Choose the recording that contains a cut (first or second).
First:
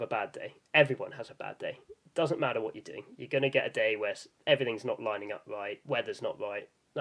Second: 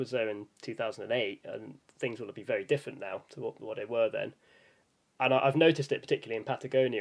first